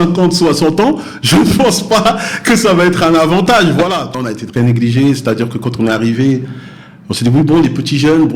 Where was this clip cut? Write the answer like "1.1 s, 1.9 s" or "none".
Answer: 4.2 s